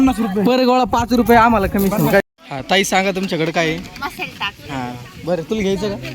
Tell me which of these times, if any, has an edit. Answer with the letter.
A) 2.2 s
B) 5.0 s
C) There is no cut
A